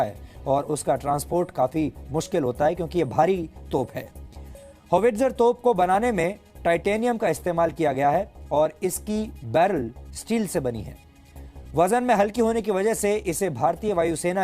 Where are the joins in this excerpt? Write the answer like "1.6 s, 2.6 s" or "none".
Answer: none

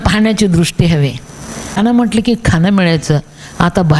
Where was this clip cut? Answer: 1.8 s

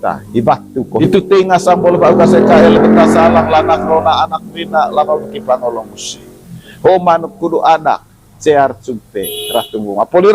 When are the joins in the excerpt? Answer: 1.0 s

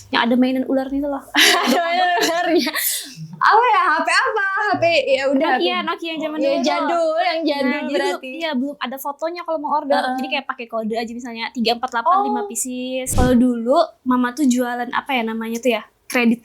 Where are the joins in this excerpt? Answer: 13.1 s

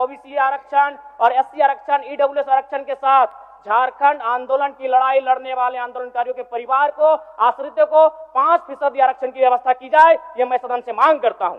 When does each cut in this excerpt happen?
none

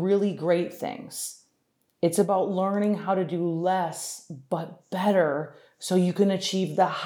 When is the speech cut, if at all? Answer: none

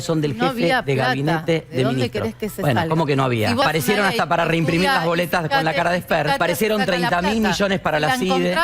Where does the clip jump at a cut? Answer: 3.6 s, 6.4 s

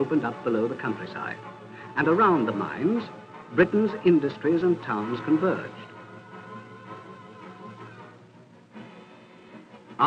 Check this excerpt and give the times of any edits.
3.1 s

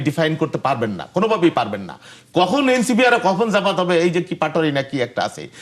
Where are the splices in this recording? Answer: none

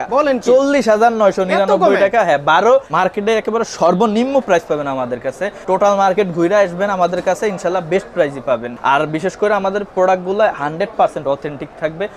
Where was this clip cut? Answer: 2.9 s, 5.5 s, 8.7 s

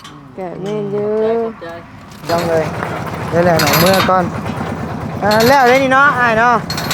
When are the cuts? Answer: 2.3 s

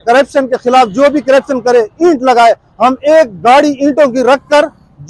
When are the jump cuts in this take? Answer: none

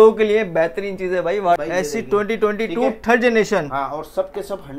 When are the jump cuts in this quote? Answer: 1.6 s

